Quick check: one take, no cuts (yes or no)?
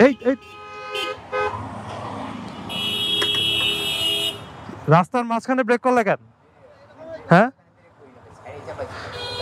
yes